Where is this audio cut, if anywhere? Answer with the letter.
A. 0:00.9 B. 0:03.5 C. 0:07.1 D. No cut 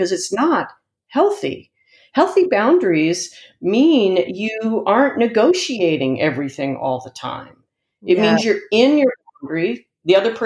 D